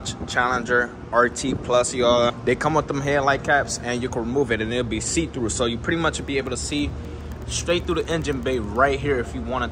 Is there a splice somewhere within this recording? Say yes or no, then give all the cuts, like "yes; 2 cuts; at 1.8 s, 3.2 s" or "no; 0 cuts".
yes; 1 cut; at 2.4 s